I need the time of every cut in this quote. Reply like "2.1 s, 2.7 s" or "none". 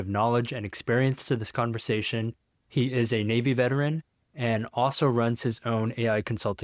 none